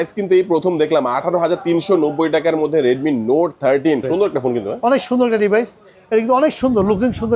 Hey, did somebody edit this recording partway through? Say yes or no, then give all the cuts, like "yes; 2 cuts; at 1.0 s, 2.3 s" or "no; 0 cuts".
yes; 1 cut; at 4.0 s